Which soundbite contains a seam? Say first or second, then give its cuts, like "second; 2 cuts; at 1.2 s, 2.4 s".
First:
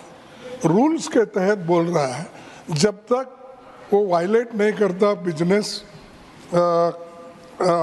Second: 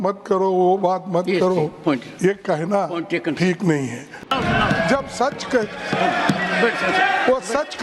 second; 1 cut; at 4.2 s